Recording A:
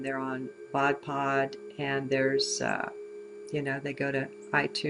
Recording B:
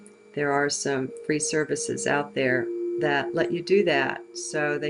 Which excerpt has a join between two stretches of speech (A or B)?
A